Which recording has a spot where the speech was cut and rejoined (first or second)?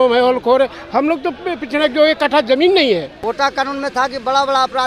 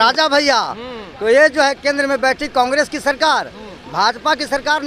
first